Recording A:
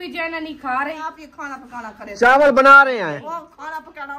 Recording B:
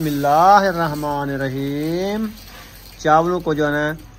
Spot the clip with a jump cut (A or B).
A